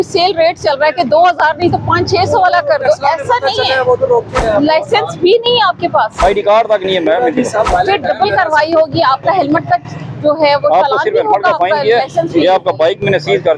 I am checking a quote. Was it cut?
yes; 3 cuts; at 4.3 s, 6.1 s, 7.7 s

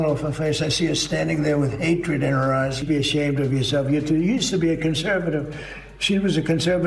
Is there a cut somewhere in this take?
yes; 1 cut; at 2.8 s

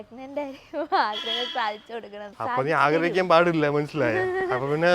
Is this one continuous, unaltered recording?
no; 1 cut; at 2.3 s

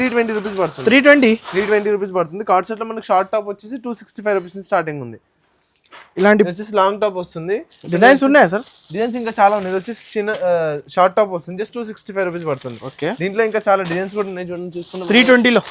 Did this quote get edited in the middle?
no; 0 cuts

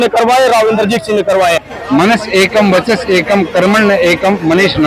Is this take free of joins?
no; 1 cut; at 1.7 s

